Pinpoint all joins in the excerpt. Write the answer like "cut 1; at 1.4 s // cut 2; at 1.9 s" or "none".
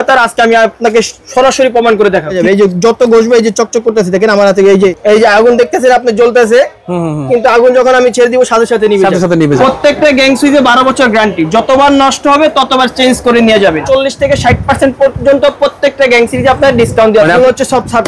cut 1; at 2.4 s // cut 2; at 5.0 s // cut 3; at 9.6 s // cut 4; at 13.8 s // cut 5; at 17.4 s

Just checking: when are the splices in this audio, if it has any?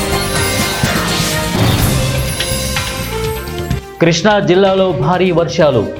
none

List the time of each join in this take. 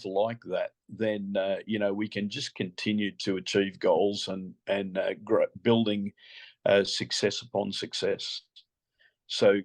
none

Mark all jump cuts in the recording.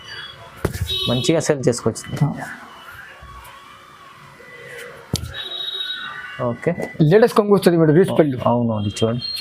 cut 1; at 6.9 s

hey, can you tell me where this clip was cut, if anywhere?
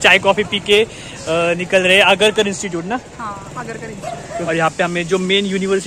cut 1; at 4.5 s

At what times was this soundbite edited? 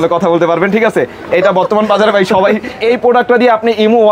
cut 1; at 2.8 s

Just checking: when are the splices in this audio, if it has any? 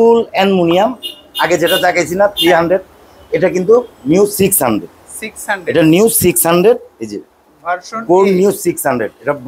none

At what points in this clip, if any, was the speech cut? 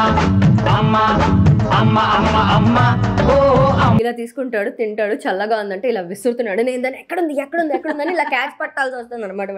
cut 1; at 4.0 s

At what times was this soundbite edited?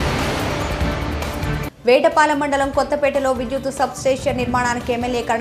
cut 1; at 1.5 s

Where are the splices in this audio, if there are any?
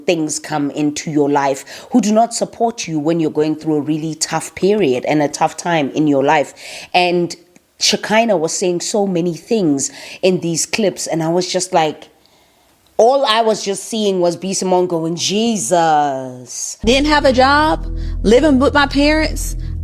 none

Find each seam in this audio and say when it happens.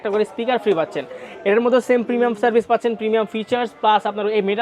none

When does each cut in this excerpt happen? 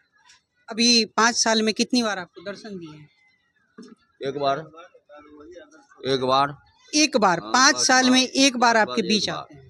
none

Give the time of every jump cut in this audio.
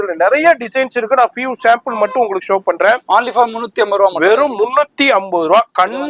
cut 1; at 3.0 s

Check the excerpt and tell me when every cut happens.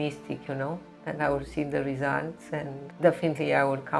cut 1; at 2.8 s

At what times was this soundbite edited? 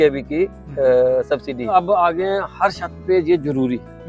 cut 1; at 1.6 s

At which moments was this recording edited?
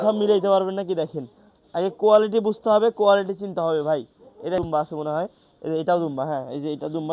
cut 1; at 4.6 s

